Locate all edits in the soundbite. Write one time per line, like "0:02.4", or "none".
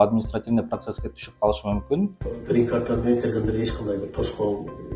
0:02.3